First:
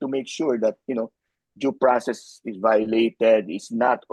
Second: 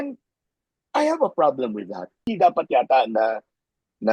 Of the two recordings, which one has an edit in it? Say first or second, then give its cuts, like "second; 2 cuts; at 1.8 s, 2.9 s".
second; 1 cut; at 2.1 s